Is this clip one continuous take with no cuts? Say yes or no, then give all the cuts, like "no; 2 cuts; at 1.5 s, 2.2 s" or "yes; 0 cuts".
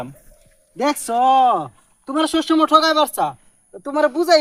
yes; 0 cuts